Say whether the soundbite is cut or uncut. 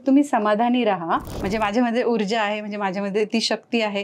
cut